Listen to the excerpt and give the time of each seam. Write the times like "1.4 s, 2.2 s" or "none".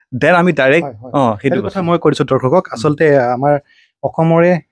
none